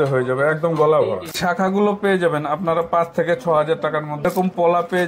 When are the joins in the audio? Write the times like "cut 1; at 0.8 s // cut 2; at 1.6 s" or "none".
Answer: cut 1; at 1.3 s // cut 2; at 4.3 s

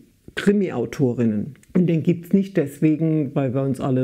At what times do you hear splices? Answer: cut 1; at 1.5 s

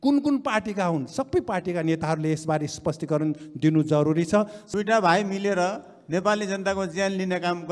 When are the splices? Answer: cut 1; at 4.6 s

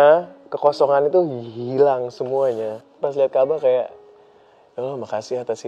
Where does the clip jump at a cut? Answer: cut 1; at 2.8 s

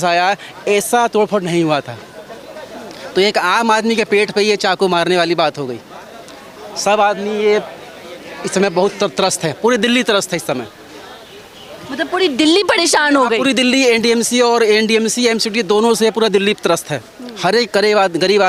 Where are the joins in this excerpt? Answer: none

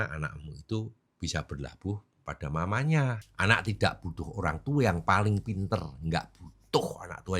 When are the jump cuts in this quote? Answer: cut 1; at 3.2 s

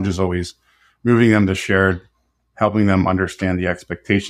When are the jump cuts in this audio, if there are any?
none

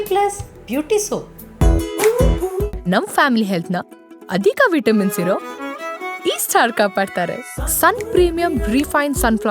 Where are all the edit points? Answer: cut 1; at 1.4 s

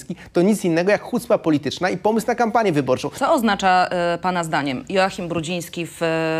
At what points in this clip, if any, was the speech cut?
cut 1; at 3.1 s

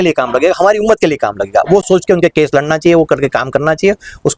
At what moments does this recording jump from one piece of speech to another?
none

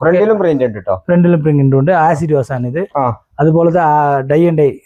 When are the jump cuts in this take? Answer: none

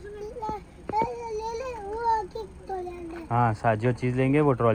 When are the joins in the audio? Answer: none

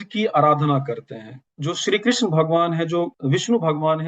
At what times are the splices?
cut 1; at 1.4 s // cut 2; at 3.2 s

